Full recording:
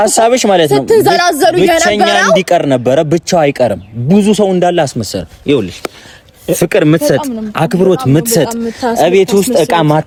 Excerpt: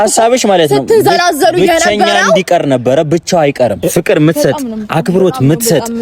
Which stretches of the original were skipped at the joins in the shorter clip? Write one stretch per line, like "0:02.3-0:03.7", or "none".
0:03.8-0:06.4